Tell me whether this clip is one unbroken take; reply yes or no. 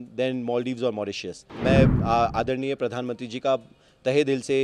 no